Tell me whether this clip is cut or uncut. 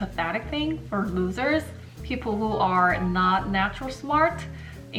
uncut